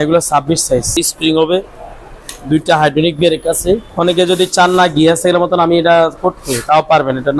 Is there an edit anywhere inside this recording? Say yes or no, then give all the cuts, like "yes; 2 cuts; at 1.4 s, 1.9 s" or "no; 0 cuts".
yes; 2 cuts; at 0.9 s, 3.9 s